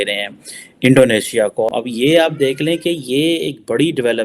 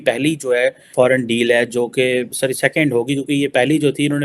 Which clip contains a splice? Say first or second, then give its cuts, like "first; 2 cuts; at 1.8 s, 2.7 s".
first; 1 cut; at 1.7 s